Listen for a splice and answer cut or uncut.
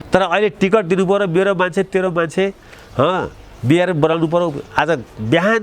uncut